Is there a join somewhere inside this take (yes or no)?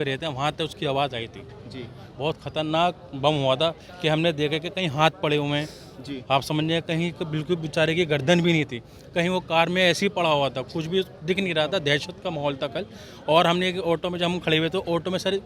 no